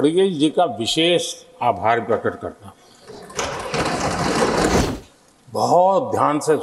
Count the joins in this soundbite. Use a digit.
1